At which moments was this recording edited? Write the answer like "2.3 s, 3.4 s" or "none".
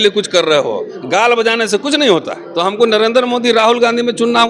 2.4 s